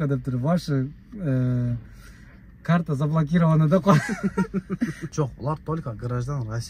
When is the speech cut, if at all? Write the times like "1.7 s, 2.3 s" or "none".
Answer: 5.0 s